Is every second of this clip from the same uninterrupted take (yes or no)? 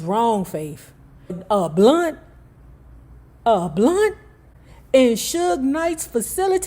no